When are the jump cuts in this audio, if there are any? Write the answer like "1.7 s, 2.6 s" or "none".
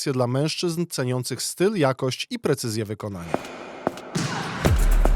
3.2 s